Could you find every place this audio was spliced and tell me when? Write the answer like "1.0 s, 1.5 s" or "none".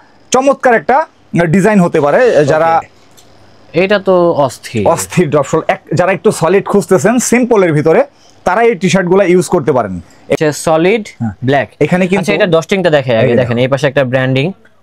2.9 s, 10.4 s